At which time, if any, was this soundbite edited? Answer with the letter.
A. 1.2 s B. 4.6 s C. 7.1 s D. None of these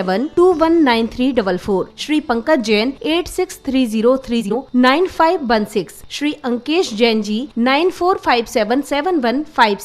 B